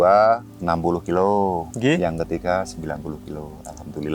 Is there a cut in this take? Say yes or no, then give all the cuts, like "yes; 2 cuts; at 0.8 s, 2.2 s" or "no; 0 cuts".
yes; 1 cut; at 1.7 s